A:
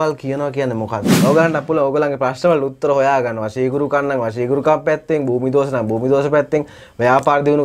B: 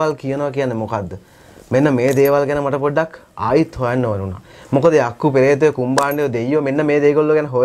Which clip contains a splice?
A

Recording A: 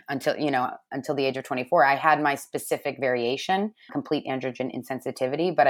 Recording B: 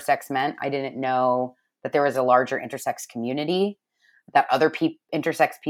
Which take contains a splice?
A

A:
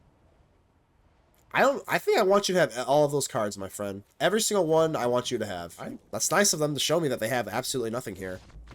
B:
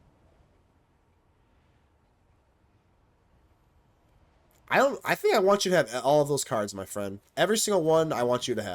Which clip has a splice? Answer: A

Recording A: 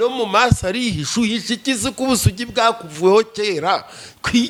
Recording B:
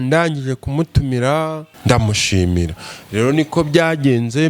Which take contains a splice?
B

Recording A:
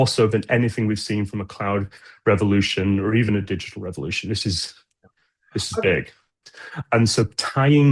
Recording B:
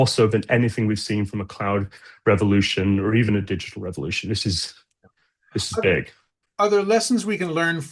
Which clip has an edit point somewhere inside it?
A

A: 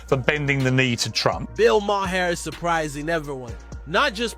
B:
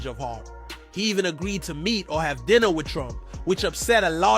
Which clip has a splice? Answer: A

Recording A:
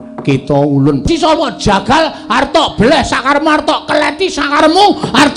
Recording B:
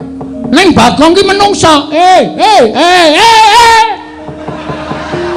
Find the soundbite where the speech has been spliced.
A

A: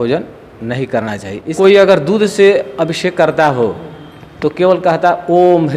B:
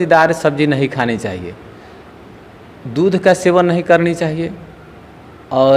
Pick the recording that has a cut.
A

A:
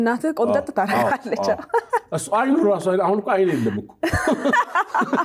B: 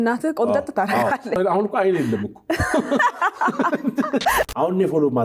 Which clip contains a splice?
B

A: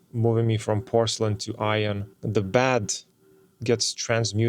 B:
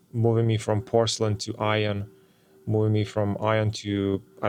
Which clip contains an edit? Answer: A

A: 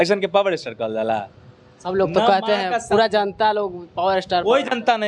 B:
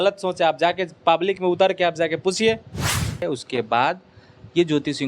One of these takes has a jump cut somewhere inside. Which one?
B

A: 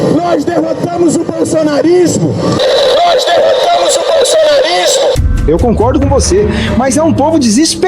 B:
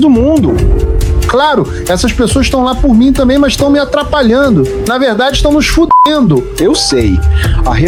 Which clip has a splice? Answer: A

